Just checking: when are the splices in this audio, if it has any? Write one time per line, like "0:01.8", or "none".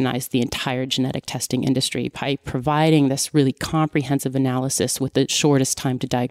0:05.3